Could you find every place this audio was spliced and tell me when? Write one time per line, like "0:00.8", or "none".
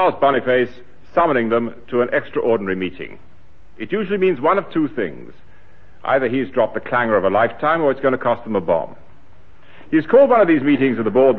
0:08.7